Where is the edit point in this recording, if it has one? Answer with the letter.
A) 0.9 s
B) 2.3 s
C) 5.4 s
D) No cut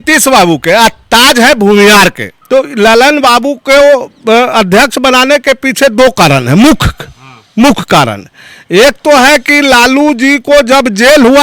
B